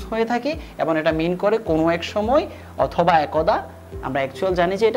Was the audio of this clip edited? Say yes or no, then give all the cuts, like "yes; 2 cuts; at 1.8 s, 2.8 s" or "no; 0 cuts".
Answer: no; 0 cuts